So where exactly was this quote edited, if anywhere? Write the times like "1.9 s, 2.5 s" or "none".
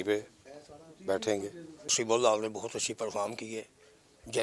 1.2 s